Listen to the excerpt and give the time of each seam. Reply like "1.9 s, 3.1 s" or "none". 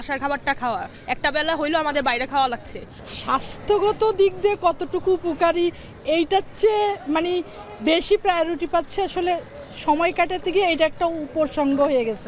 none